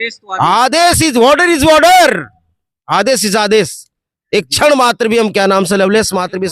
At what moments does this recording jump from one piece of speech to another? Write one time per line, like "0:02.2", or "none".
none